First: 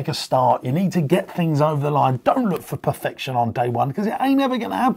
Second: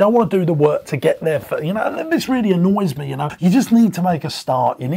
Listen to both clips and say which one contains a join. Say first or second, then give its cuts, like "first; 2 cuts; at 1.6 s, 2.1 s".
second; 1 cut; at 3.2 s